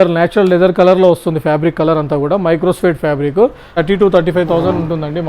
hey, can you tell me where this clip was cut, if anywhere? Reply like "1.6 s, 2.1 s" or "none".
3.8 s